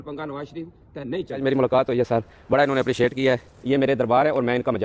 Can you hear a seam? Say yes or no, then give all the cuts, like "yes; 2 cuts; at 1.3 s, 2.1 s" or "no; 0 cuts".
yes; 2 cuts; at 1.4 s, 3.5 s